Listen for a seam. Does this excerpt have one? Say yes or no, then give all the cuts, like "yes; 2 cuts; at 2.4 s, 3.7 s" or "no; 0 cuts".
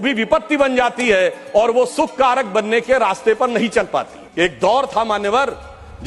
yes; 1 cut; at 4.2 s